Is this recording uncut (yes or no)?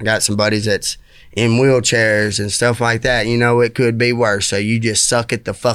yes